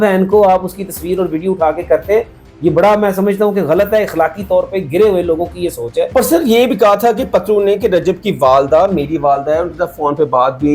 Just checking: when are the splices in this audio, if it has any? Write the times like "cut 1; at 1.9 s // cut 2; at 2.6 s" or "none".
cut 1; at 6.1 s